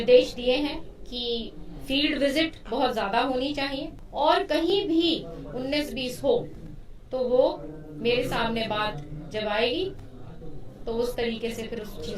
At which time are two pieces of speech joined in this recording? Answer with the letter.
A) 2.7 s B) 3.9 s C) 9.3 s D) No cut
B